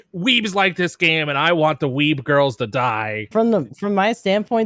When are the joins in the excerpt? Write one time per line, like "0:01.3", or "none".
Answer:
0:03.2